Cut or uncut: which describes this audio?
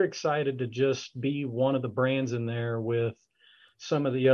uncut